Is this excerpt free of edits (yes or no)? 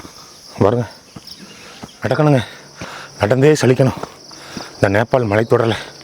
no